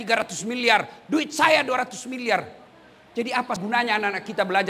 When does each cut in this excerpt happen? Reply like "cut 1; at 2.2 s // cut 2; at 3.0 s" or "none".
cut 1; at 3.6 s